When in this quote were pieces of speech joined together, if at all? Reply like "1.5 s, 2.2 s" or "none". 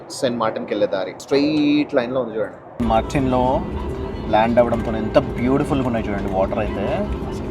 1.2 s, 2.6 s

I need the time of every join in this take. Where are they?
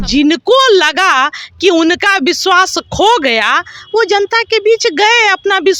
none

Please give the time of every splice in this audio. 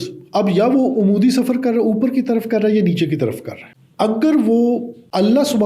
none

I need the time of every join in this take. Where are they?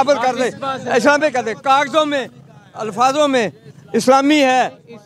none

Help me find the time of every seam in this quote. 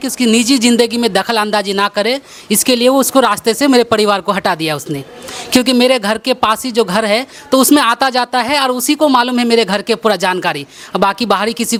none

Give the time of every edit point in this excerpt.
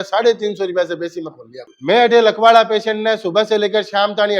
1.7 s

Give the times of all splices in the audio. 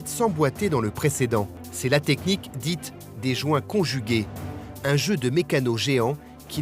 1.6 s

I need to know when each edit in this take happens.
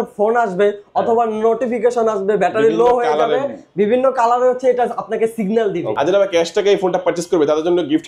5.9 s

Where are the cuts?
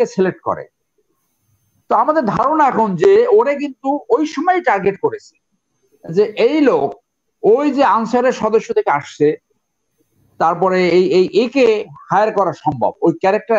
none

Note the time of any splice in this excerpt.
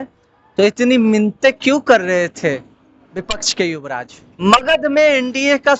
4.2 s

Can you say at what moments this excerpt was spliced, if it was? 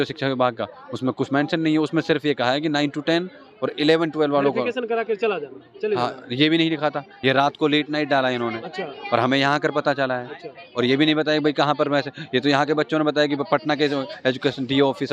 7.1 s

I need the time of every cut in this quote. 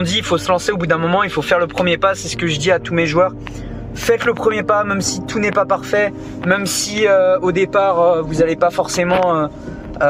none

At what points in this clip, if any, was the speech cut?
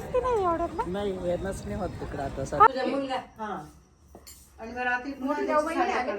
2.7 s

